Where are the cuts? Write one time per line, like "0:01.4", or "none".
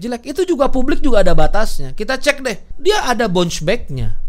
0:02.7